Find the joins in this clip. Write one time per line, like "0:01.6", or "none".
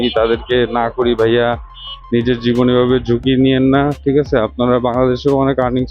none